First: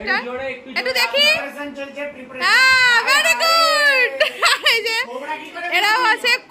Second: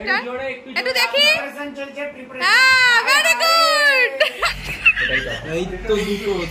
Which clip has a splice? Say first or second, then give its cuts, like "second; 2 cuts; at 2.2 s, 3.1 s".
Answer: second; 1 cut; at 4.4 s